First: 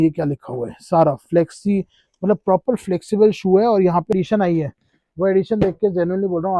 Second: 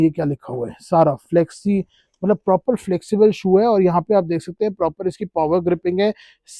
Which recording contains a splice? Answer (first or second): first